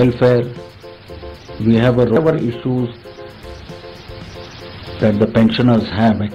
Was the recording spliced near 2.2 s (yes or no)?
yes